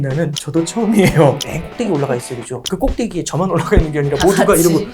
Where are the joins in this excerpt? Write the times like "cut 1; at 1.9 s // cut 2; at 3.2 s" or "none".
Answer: cut 1; at 1.4 s